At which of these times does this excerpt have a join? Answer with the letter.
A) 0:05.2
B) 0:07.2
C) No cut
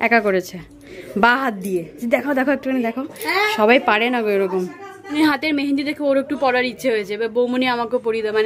A